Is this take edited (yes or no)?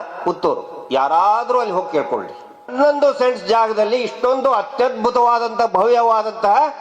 yes